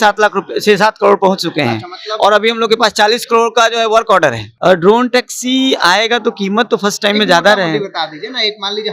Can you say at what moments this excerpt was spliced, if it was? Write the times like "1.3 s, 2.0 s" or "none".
4.5 s